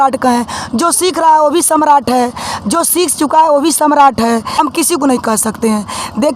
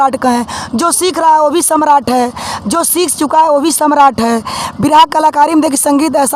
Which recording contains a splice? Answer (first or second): first